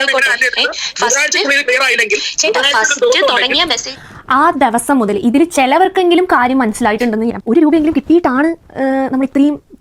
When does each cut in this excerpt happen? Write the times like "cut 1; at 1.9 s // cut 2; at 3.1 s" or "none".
cut 1; at 7.3 s